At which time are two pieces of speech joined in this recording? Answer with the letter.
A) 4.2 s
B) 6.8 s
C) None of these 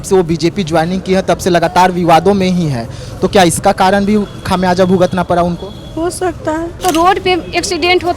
B